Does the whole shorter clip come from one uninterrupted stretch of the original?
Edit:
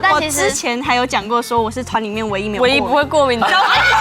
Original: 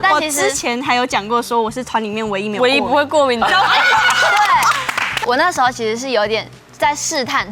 yes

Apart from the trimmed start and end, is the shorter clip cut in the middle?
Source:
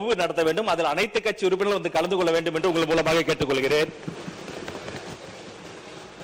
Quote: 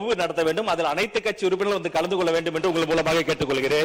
no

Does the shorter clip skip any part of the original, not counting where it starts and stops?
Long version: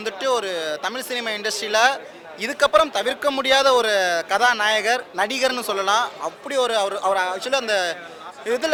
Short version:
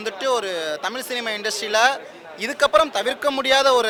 no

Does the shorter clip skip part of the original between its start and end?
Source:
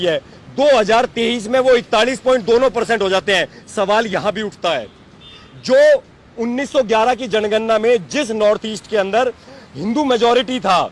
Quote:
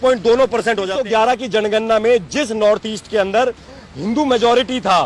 yes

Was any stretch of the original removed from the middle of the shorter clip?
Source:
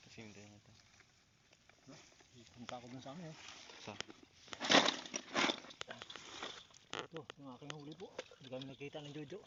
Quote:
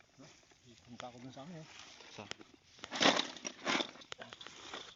no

